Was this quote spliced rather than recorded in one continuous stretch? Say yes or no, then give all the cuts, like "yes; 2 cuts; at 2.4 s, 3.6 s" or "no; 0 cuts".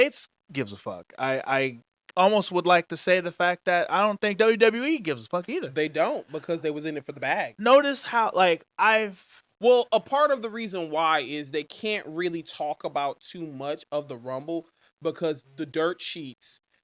no; 0 cuts